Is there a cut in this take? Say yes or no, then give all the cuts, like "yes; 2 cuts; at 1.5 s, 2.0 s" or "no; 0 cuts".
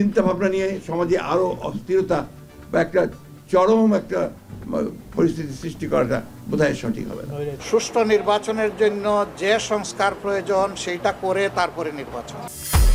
no; 0 cuts